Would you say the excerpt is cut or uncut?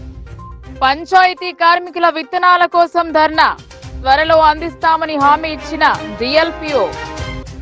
uncut